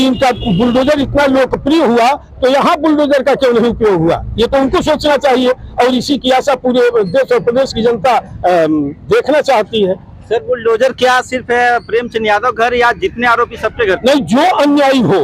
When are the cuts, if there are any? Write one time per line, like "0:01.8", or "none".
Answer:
none